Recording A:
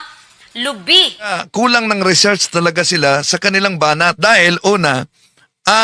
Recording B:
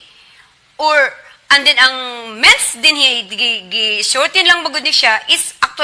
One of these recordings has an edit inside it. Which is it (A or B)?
A